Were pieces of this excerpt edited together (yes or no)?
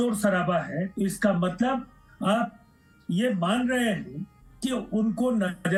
no